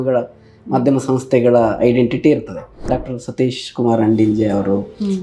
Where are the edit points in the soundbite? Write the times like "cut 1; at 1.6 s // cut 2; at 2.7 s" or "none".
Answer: cut 1; at 2.9 s